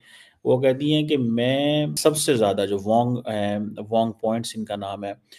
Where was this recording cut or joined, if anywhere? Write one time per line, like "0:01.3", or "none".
0:01.9